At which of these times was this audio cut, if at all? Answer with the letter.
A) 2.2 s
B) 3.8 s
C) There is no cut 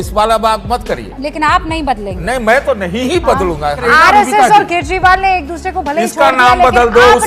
B